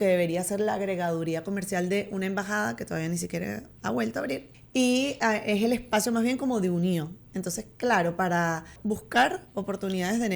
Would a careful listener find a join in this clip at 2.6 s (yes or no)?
no